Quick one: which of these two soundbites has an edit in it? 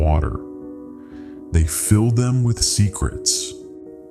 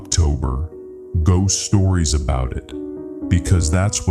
first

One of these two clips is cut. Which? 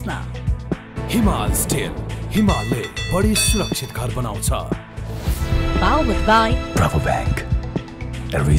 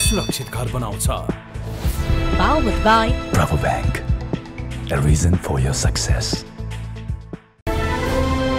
second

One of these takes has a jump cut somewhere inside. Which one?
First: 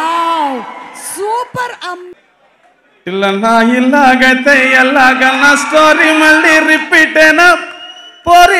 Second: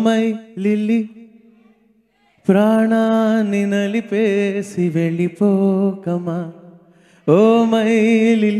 first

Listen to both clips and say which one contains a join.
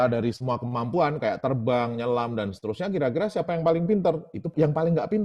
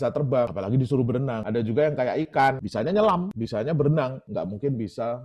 second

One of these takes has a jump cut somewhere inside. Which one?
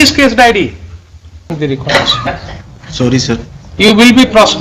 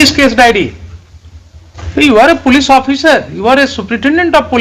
first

